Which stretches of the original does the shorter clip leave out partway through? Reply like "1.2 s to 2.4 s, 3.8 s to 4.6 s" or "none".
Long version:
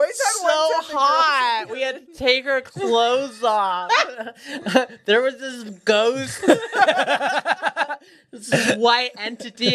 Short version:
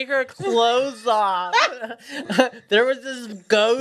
none